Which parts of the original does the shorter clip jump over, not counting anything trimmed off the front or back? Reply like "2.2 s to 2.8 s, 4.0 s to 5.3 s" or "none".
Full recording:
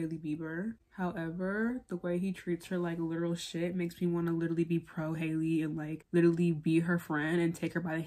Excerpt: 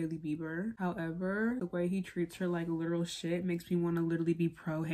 0.8 s to 0.9 s, 1.8 s to 1.9 s